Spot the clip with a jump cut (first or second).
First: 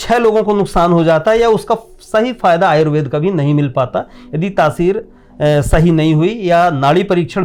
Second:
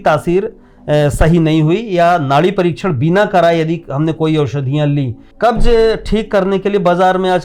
second